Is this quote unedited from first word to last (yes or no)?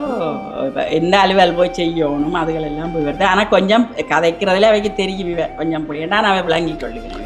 yes